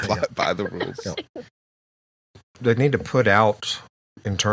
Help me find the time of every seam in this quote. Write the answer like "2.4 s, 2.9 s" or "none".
2.2 s